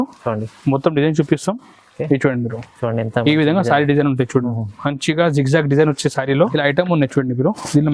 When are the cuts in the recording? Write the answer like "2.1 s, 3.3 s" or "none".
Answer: 6.5 s